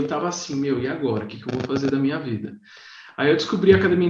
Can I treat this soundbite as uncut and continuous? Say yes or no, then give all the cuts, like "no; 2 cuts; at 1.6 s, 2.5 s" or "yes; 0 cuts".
yes; 0 cuts